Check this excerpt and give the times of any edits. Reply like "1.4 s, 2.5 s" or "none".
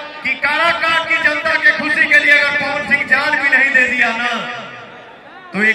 none

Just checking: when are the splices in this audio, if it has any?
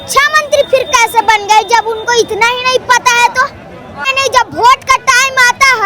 4.1 s

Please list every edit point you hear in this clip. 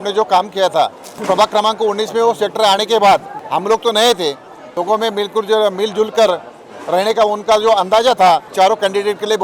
1.1 s, 3.4 s, 4.7 s, 8.5 s

